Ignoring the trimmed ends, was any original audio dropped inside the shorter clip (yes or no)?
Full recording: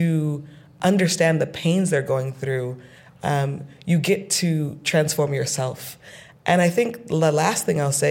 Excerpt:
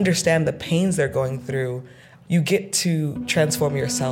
yes